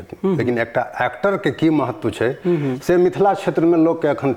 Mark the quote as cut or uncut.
uncut